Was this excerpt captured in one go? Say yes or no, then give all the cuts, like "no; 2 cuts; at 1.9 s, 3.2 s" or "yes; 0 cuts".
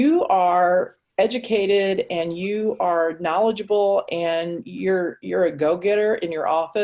yes; 0 cuts